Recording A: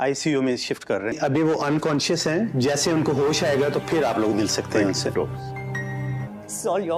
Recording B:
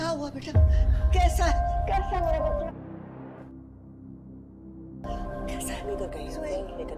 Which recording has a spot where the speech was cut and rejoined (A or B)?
B